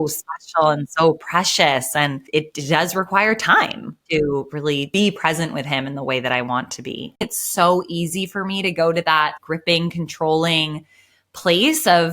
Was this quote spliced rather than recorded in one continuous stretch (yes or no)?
yes